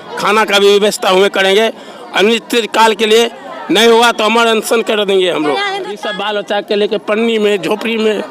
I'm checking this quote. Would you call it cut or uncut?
cut